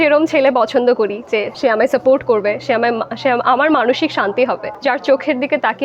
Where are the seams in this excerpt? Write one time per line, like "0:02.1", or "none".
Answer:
0:01.5
0:04.7

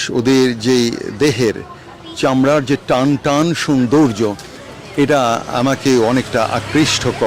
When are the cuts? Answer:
none

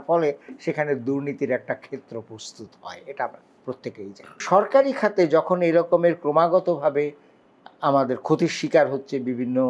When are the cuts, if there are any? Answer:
0:04.4

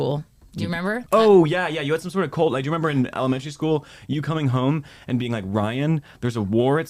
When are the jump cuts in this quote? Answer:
0:01.0

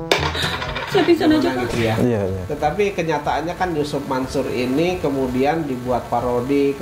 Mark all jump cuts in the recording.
0:01.6

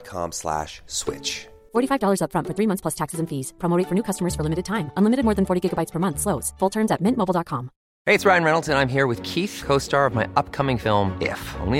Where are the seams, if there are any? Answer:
none

